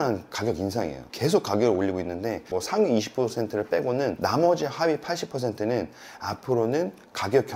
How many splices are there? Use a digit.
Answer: 1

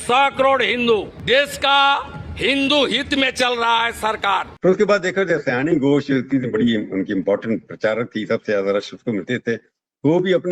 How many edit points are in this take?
2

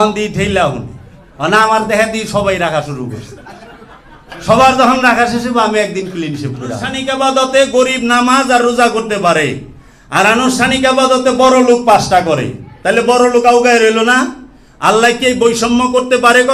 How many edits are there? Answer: 1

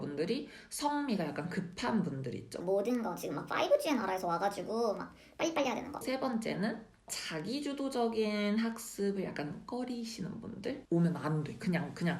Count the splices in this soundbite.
3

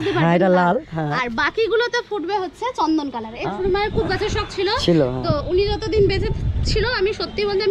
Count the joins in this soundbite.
1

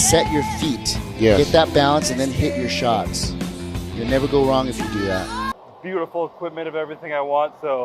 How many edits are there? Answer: 1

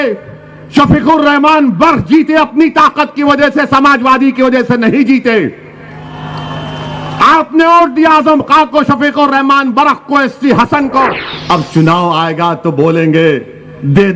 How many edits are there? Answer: 1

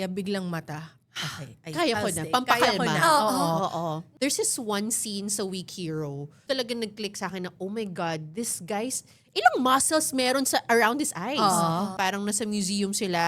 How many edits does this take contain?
3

